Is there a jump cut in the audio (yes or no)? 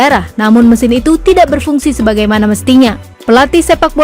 yes